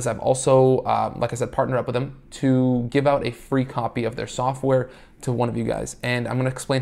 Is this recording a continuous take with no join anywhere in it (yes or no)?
yes